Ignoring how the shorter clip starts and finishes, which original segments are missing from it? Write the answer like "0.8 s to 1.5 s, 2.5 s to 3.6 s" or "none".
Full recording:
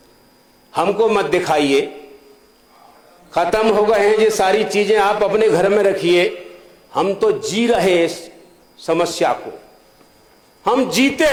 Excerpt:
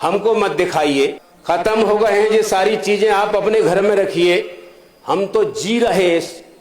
2.0 s to 3.2 s